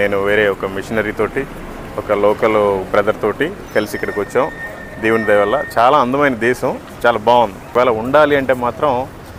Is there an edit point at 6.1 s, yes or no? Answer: no